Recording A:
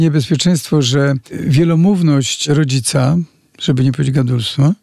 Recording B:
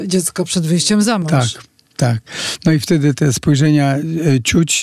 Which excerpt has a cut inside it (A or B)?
A